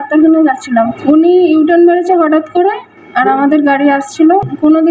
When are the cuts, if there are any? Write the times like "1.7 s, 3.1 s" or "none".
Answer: 0.9 s

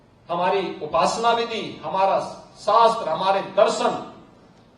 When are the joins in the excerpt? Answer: none

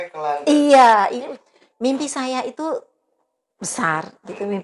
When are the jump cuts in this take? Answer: 1.3 s

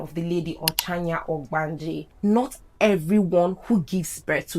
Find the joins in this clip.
2.1 s

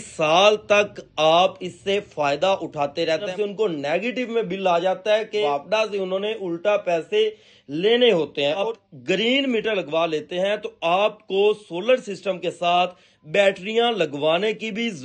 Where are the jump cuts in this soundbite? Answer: 3.3 s, 5.4 s, 8.7 s

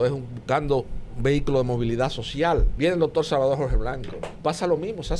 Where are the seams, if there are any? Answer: 2.7 s, 4.2 s

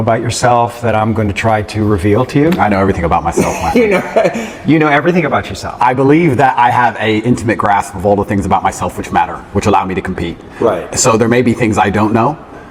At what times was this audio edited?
none

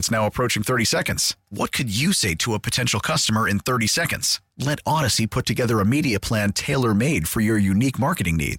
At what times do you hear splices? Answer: none

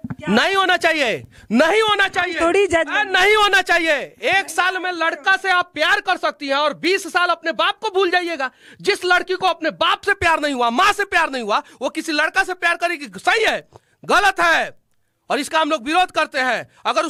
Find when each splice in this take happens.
none

